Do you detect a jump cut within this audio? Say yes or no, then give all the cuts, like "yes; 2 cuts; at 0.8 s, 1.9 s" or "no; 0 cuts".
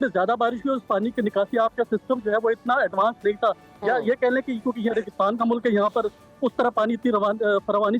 no; 0 cuts